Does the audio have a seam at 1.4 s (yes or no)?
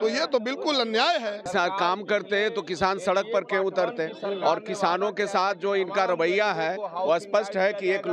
yes